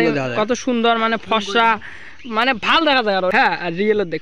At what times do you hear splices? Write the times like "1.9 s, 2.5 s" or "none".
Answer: 3.3 s